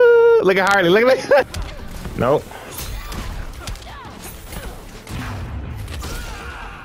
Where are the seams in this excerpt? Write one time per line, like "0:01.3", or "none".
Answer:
0:01.5